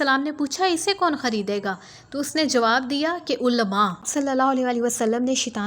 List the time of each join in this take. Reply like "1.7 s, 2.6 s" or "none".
4.0 s